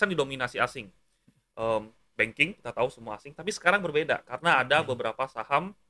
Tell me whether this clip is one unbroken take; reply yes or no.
yes